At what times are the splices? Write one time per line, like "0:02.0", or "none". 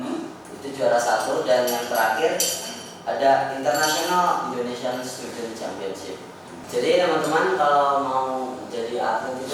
0:06.5

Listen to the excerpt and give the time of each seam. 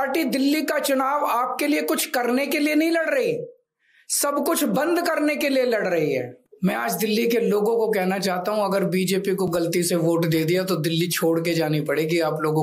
0:06.4

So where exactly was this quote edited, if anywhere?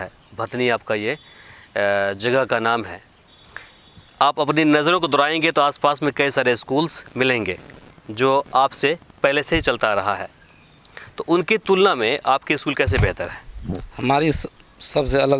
none

